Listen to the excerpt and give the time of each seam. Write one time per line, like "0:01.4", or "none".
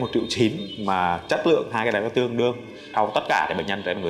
0:02.9